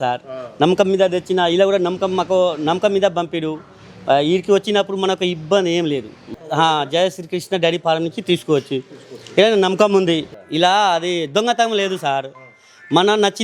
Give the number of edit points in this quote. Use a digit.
2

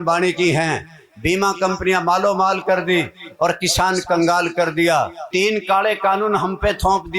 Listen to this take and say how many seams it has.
1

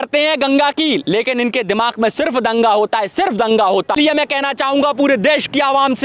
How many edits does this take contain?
1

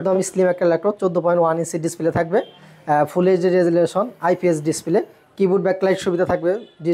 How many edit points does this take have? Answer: 0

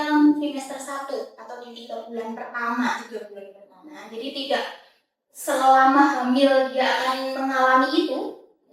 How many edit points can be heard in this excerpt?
0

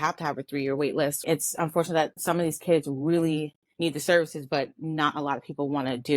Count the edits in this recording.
1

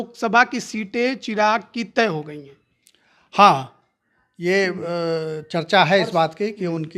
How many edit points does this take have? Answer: 0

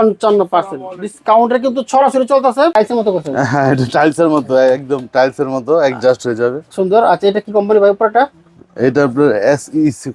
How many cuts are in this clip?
1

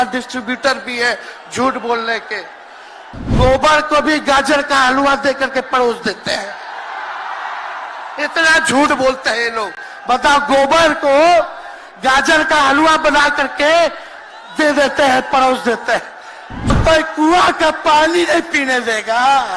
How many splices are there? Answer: 2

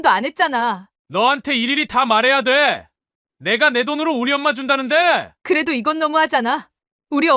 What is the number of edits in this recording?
2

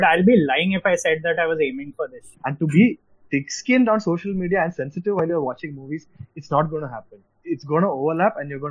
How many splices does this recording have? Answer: 1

